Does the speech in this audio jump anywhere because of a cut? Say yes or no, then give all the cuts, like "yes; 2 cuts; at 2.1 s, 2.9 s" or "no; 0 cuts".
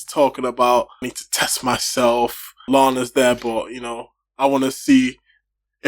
yes; 2 cuts; at 1.2 s, 2.6 s